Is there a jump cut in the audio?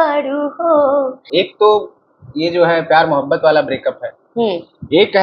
yes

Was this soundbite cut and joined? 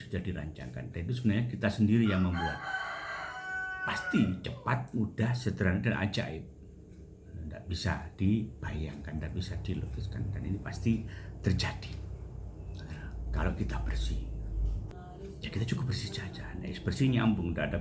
yes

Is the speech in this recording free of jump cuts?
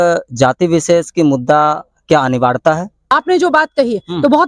no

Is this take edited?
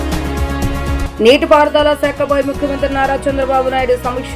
yes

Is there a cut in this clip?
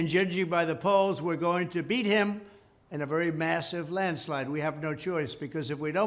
yes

